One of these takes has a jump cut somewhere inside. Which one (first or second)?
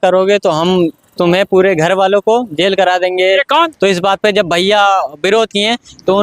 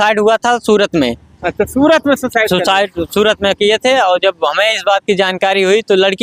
first